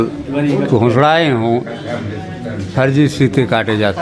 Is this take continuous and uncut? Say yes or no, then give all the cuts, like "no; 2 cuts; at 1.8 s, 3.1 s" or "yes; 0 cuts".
yes; 0 cuts